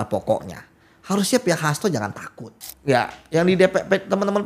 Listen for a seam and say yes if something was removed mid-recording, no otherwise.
yes